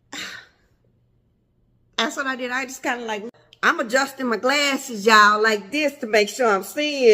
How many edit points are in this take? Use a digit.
1